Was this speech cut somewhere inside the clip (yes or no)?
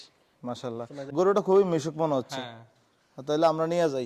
yes